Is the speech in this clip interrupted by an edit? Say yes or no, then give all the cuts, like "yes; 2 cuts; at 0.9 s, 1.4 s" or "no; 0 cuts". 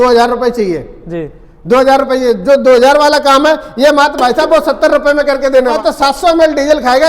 yes; 1 cut; at 6.0 s